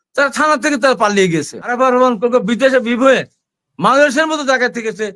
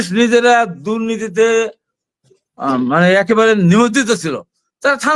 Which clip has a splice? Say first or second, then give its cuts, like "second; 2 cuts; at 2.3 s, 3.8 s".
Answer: first; 1 cut; at 1.7 s